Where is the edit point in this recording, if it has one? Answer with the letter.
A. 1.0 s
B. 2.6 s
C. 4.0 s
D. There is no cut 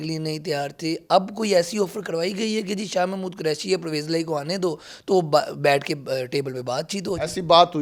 D